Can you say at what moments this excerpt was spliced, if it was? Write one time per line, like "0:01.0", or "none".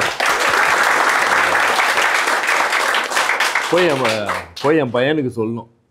none